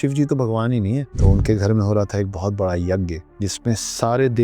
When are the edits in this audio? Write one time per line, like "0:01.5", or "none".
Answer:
0:01.1
0:03.2